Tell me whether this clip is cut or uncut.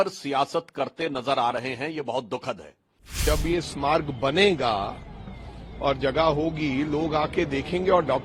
cut